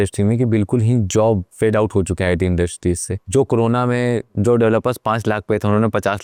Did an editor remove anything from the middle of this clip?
no; 0 cuts

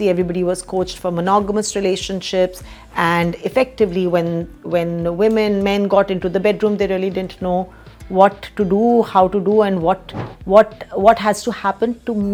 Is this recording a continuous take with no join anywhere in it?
yes; 0 cuts

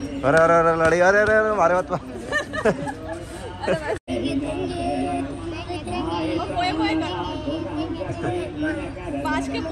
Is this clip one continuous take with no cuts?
yes; 0 cuts

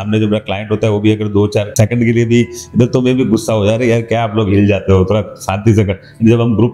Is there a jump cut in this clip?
no; 0 cuts

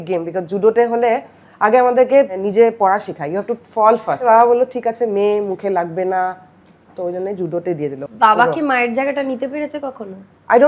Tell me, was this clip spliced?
yes; 3 cuts; at 2.4 s, 4.2 s, 8.0 s

